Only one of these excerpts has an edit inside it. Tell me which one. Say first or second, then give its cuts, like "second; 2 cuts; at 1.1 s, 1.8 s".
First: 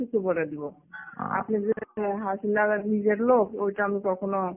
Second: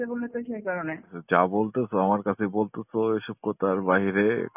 second; 1 cut; at 1.2 s